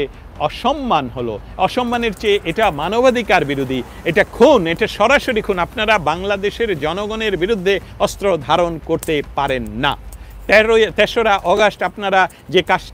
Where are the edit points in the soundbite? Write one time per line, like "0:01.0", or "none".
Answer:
none